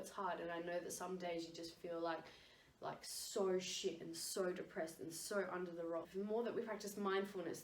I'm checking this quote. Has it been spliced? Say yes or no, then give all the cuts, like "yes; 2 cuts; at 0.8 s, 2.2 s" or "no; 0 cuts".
yes; 1 cut; at 6.1 s